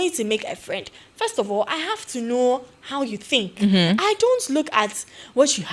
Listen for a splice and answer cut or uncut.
uncut